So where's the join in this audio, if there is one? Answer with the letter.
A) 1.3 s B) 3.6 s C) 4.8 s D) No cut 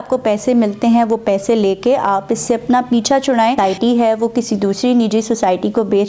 B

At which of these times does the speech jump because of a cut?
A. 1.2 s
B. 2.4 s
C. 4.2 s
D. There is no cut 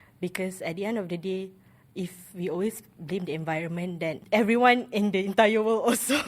C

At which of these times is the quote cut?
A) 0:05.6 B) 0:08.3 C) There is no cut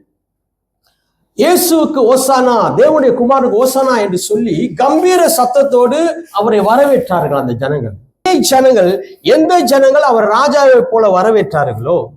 B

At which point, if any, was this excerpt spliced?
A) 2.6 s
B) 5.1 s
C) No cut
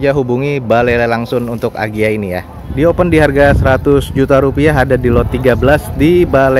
A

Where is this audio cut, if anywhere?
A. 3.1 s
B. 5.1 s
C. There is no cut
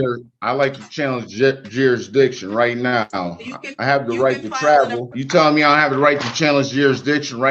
B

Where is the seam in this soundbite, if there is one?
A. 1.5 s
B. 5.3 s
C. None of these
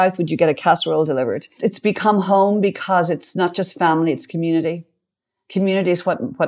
A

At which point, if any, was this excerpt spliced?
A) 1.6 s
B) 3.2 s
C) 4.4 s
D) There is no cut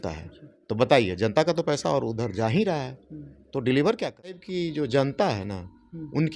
C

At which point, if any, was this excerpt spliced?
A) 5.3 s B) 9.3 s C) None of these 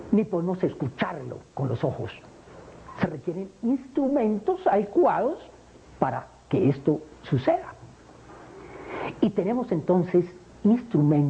B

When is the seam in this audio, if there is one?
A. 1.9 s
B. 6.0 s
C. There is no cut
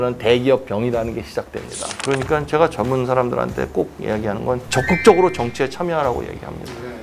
A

